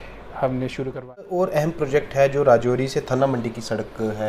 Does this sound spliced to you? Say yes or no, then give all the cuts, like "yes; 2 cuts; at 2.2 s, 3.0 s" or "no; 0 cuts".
yes; 1 cut; at 1.3 s